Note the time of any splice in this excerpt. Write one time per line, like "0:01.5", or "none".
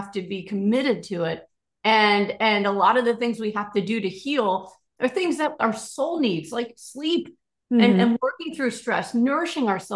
none